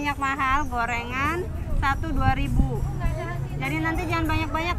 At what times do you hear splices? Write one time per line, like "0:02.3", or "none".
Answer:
none